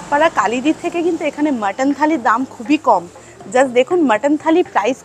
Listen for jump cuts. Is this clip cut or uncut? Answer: uncut